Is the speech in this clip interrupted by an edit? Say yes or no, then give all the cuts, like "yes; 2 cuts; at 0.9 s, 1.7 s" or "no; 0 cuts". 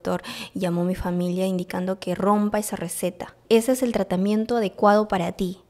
yes; 1 cut; at 3.4 s